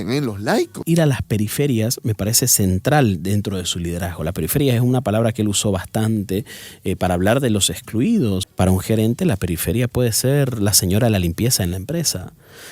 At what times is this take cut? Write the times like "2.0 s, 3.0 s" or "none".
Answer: 0.8 s, 8.4 s